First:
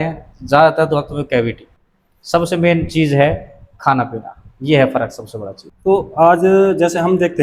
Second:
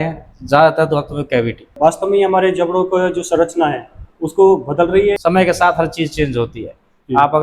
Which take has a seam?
second; 2 cuts; at 1.7 s, 5.2 s

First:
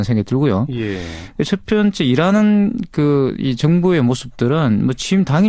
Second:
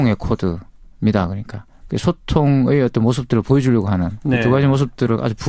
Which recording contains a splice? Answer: first; 1 cut; at 3.4 s

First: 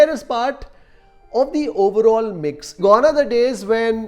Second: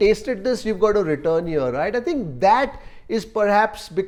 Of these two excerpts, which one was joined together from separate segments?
first; 1 cut; at 2.6 s

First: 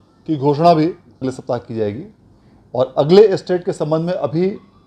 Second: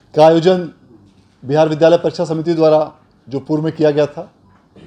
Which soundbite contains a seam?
first; 1 cut; at 1.3 s

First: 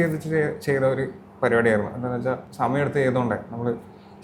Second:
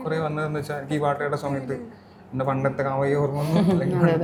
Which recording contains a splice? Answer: first; 1 cut; at 2.5 s

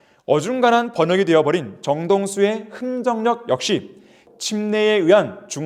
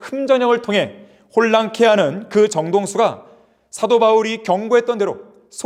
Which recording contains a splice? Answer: first; 1 cut; at 4.2 s

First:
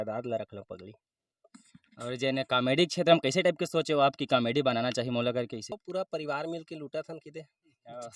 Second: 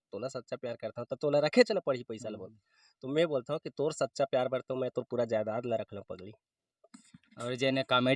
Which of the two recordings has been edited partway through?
first; 1 cut; at 5.7 s

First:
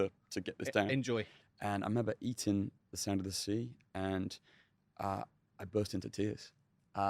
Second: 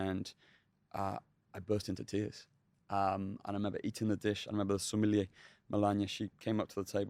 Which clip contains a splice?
first; 1 cut; at 1.4 s

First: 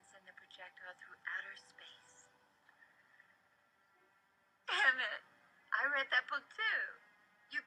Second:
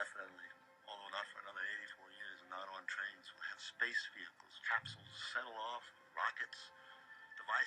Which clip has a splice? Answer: second; 1 cut; at 1.3 s

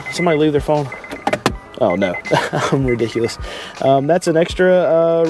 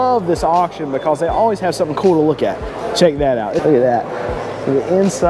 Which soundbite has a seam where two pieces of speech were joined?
second; 2 cuts; at 2.7 s, 3.6 s

